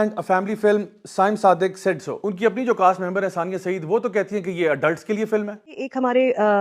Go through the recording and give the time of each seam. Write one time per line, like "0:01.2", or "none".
0:02.3